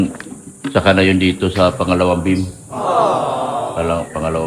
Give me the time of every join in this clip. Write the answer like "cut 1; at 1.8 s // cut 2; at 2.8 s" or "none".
cut 1; at 2.4 s // cut 2; at 3.7 s

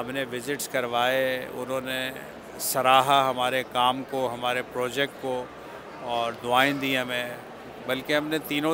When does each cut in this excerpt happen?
none

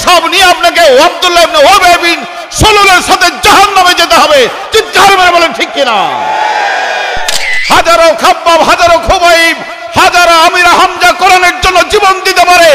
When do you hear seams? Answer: cut 1; at 7.5 s

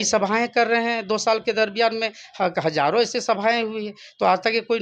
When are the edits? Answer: none

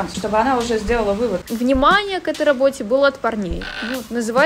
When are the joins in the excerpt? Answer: cut 1; at 1.4 s

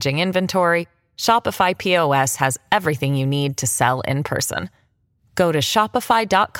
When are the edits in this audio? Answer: none

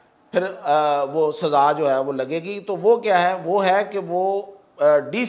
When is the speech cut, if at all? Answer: none

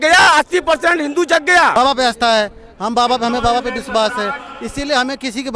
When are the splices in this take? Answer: cut 1; at 1.7 s

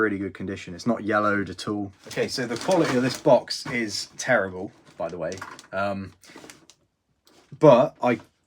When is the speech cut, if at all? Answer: cut 1; at 2.0 s

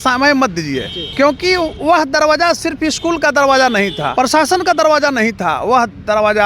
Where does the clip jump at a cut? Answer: cut 1; at 1.0 s // cut 2; at 4.0 s

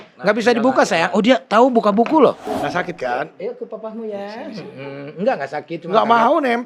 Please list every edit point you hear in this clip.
cut 1; at 2.5 s

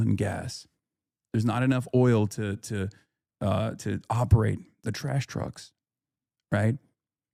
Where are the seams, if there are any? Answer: none

